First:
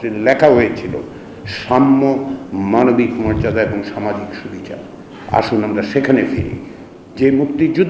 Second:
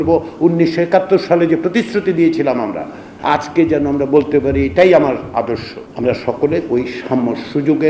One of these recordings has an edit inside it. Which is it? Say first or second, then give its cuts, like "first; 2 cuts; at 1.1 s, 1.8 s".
second; 2 cuts; at 3.1 s, 5.8 s